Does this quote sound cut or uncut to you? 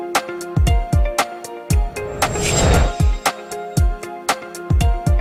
uncut